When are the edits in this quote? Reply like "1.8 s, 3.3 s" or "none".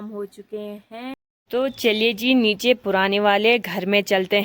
1.7 s